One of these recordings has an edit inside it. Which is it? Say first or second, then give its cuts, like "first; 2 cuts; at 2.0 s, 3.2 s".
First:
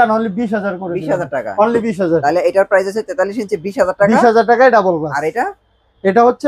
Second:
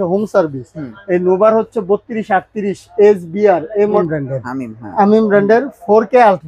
second; 1 cut; at 4.0 s